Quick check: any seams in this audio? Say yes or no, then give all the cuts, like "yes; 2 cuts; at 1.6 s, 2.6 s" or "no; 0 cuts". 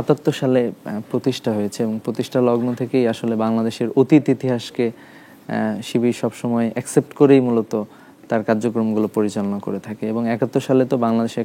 no; 0 cuts